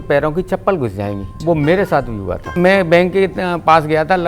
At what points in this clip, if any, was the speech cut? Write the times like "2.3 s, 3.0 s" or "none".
1.3 s, 2.4 s